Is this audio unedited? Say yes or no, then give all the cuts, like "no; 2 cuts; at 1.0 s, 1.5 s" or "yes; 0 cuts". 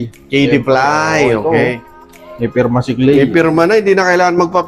yes; 0 cuts